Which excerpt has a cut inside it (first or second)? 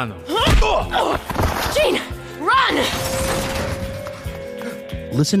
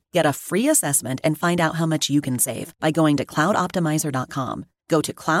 first